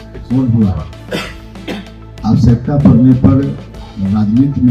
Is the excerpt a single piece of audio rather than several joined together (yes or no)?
yes